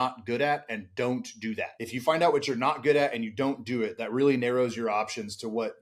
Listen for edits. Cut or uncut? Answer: cut